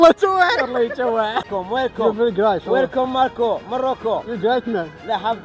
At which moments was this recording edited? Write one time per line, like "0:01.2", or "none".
0:01.5